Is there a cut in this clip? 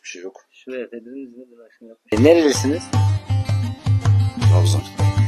yes; 1 cut; at 2.1 s

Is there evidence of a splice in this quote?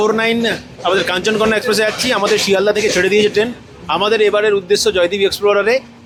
no; 0 cuts

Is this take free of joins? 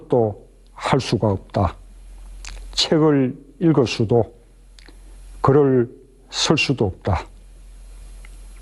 yes; 0 cuts

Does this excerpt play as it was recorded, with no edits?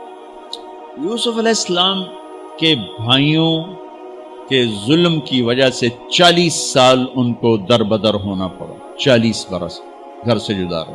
no; 1 cut; at 1.0 s

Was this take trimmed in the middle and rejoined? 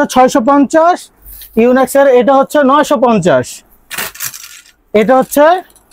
no; 0 cuts

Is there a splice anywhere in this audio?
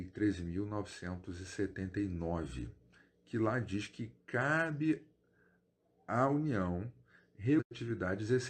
yes; 1 cut; at 7.6 s

